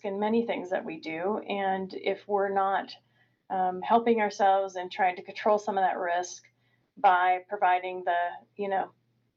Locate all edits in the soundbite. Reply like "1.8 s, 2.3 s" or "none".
none